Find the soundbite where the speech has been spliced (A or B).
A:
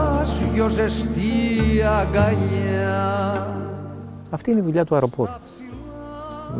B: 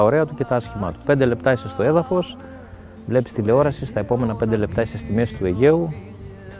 A